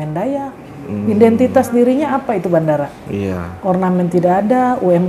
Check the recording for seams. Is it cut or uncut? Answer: uncut